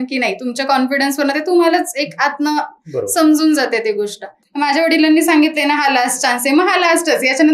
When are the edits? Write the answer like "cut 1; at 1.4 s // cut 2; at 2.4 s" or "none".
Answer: cut 1; at 4.4 s